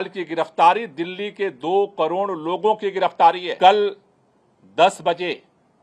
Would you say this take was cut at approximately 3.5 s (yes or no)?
yes